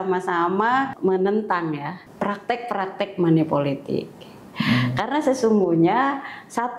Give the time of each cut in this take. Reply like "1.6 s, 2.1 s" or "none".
0.9 s, 2.0 s